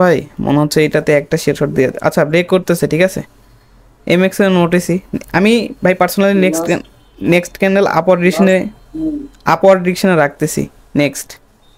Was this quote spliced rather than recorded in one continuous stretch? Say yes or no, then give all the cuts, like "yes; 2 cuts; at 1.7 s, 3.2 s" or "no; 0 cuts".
no; 0 cuts